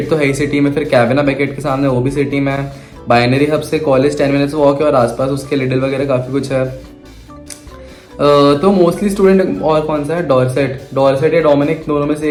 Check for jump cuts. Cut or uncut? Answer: uncut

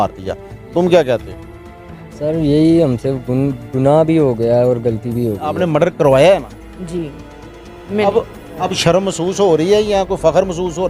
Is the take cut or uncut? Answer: cut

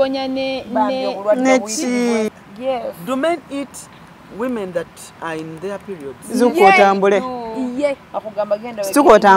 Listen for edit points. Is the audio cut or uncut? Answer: cut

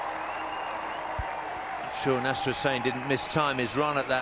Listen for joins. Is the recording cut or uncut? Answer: cut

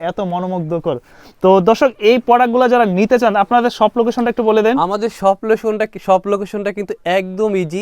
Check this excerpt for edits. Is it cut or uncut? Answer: uncut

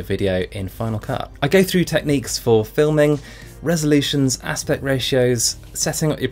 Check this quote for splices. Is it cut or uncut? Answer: cut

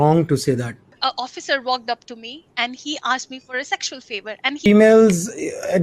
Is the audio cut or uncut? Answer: cut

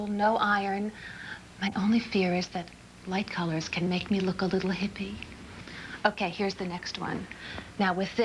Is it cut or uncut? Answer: cut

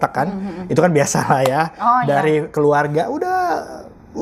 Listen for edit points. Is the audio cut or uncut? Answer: uncut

